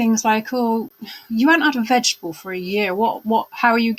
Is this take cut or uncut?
uncut